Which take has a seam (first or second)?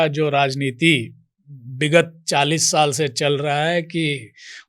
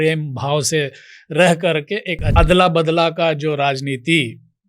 second